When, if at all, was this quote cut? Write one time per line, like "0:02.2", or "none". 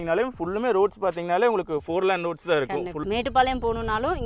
0:03.0